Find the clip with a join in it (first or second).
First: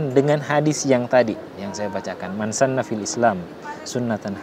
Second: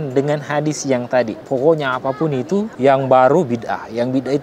second